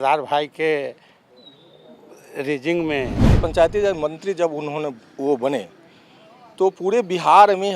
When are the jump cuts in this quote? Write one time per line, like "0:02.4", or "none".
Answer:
0:03.4